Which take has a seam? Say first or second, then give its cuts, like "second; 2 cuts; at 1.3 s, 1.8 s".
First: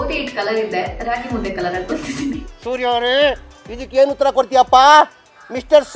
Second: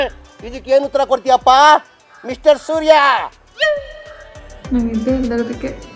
second; 1 cut; at 4.4 s